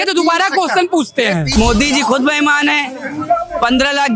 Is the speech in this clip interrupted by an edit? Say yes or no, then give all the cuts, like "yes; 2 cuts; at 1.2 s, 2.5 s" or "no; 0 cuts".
yes; 1 cut; at 1.5 s